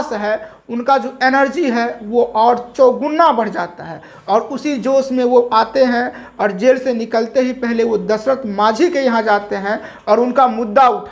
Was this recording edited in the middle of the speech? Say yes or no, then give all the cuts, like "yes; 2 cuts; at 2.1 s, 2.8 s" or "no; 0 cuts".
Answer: no; 0 cuts